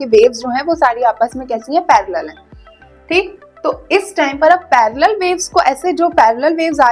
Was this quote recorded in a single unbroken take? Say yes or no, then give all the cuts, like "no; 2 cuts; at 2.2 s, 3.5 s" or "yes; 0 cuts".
yes; 0 cuts